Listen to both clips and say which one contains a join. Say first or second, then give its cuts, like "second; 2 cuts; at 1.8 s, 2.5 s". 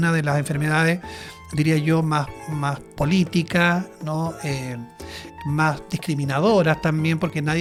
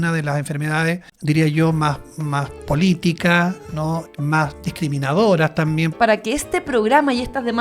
second; 3 cuts; at 1.1 s, 4.1 s, 5.9 s